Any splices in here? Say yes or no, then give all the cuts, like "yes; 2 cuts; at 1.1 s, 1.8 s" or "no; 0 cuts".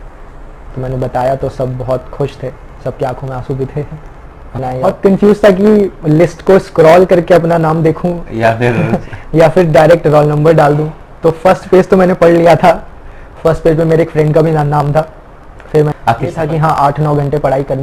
yes; 2 cuts; at 4.8 s, 16.1 s